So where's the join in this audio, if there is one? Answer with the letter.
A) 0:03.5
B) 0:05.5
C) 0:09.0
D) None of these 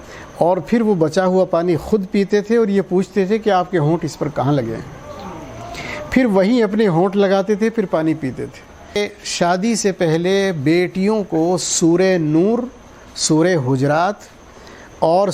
C